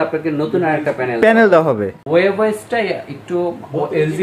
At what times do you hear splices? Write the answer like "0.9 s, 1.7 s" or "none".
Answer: 2.0 s